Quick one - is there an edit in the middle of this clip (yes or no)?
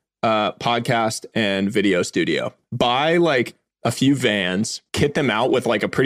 yes